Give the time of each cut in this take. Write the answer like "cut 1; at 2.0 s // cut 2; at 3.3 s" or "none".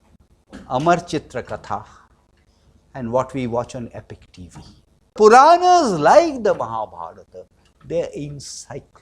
cut 1; at 5.1 s